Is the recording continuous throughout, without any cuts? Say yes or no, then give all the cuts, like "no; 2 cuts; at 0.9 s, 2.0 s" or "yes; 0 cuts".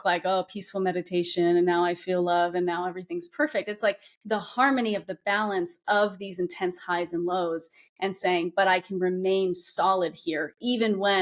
yes; 0 cuts